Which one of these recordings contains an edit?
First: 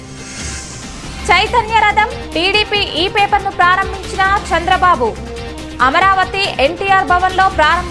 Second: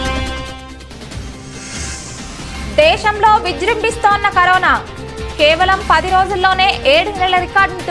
second; 1 cut; at 2.3 s

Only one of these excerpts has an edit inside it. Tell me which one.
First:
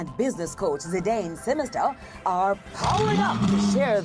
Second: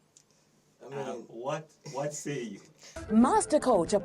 second; 1 cut; at 3.0 s

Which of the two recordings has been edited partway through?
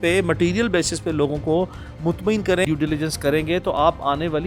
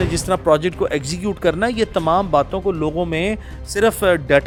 first; 1 cut; at 2.6 s

